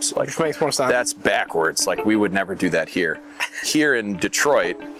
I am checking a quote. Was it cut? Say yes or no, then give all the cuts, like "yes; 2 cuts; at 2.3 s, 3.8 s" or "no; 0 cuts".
no; 0 cuts